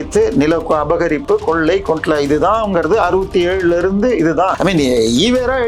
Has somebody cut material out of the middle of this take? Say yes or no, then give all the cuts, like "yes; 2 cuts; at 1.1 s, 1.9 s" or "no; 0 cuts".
yes; 1 cut; at 4.5 s